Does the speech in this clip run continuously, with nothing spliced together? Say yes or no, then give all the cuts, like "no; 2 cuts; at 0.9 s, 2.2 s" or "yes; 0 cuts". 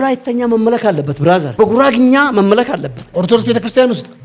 no; 1 cut; at 1.5 s